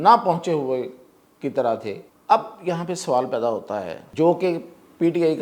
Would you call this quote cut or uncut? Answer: cut